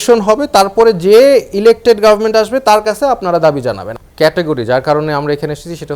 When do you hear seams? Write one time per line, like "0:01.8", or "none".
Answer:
0:03.9